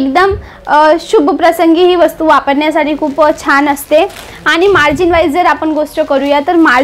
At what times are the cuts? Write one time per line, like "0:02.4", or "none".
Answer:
none